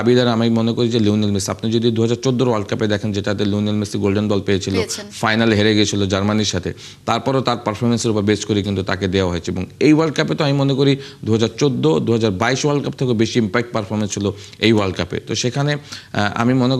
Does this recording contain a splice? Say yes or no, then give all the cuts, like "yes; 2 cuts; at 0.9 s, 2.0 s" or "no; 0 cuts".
no; 0 cuts